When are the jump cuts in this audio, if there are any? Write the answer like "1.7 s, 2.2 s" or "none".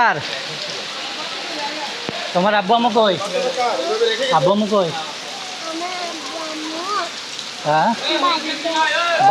none